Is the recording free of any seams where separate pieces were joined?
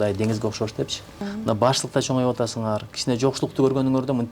no; 1 cut; at 1.3 s

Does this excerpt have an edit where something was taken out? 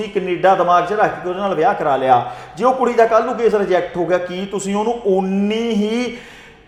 no; 0 cuts

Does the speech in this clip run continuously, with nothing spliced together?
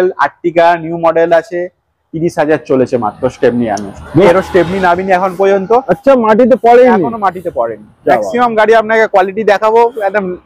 no; 1 cut; at 4.3 s

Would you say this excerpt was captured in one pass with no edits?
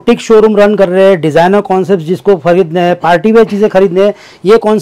yes; 0 cuts

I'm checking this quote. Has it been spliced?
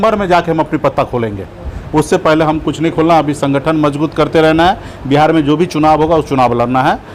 no; 0 cuts

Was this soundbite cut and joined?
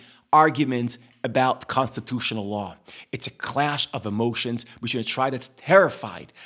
no; 0 cuts

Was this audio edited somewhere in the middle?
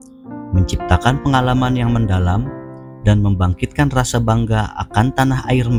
no; 0 cuts

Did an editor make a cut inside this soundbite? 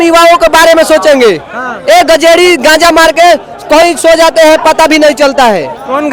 no; 0 cuts

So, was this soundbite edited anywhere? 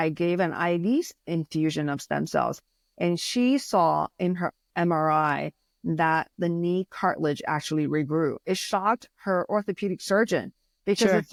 no; 0 cuts

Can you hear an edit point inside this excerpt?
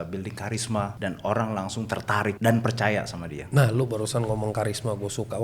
yes; 2 cuts; at 0.9 s, 2.4 s

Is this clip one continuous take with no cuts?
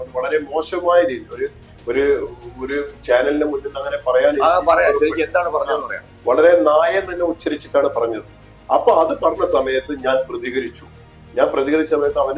yes; 0 cuts

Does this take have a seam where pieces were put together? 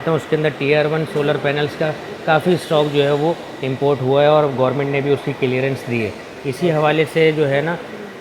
no; 0 cuts

